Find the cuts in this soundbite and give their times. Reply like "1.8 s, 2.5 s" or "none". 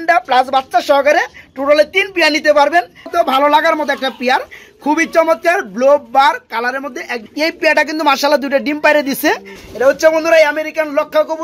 3.1 s, 7.2 s, 9.5 s